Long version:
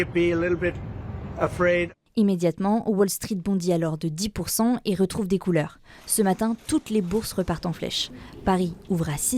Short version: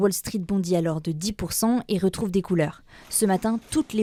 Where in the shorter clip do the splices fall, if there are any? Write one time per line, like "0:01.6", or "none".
none